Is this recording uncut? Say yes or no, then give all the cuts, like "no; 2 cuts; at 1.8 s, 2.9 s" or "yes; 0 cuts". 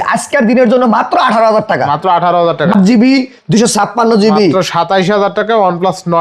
no; 1 cut; at 2.7 s